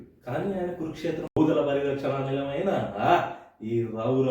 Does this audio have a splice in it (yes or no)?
yes